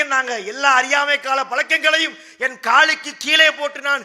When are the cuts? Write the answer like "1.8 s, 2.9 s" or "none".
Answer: none